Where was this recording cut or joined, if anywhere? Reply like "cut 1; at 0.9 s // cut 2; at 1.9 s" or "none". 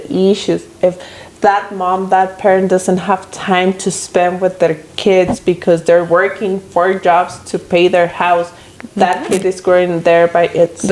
none